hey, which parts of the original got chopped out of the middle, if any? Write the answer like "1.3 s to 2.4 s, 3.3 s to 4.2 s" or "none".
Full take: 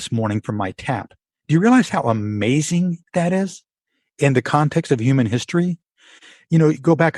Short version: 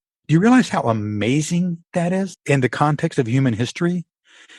3.6 s to 4.1 s